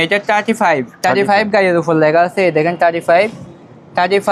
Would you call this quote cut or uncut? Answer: uncut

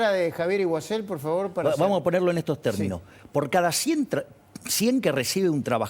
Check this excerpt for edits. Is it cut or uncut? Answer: uncut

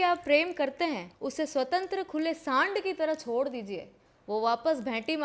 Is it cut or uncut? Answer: cut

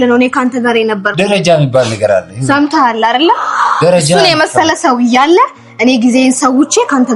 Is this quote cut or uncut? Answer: uncut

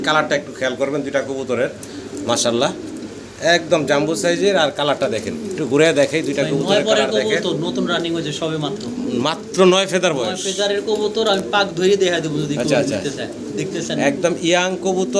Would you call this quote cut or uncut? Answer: uncut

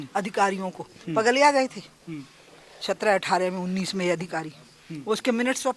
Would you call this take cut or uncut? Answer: uncut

